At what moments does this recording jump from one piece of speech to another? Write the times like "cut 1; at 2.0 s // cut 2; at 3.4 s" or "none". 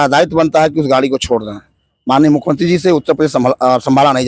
none